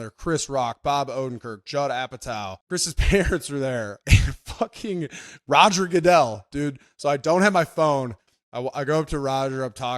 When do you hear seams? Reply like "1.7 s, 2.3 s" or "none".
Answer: 2.6 s